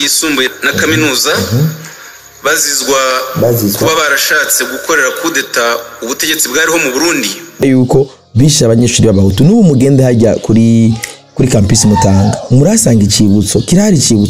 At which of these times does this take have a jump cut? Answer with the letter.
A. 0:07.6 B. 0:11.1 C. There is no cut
A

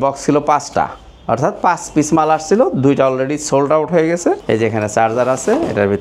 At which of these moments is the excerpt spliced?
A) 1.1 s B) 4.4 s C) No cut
B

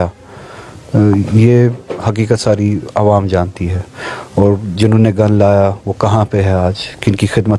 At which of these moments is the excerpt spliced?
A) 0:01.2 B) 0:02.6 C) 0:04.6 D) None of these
D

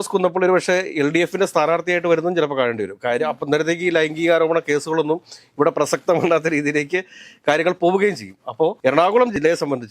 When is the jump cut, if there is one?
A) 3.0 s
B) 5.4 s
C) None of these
C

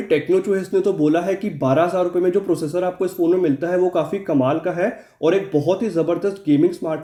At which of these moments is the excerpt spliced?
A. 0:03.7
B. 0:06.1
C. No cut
C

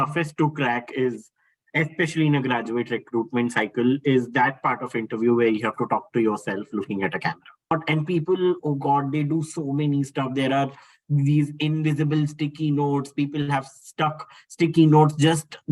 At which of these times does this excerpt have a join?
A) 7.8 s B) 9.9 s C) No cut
A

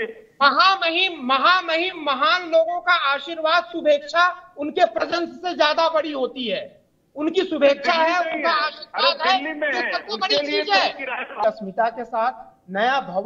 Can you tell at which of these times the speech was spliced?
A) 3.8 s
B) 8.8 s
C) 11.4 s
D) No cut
C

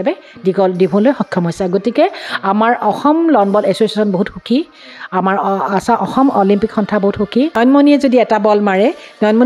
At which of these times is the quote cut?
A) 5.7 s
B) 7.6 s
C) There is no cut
B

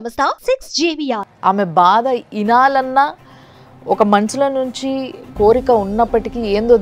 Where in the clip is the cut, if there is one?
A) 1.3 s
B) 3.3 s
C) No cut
A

